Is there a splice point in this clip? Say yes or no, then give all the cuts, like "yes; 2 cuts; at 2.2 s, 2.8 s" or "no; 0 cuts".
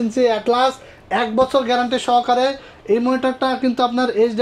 no; 0 cuts